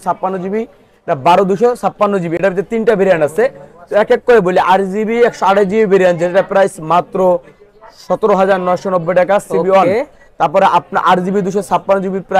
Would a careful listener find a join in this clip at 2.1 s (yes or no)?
no